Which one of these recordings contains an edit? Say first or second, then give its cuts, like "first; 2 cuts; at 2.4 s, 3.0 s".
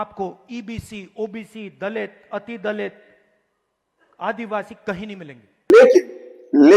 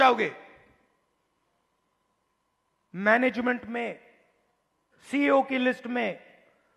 first; 1 cut; at 5.7 s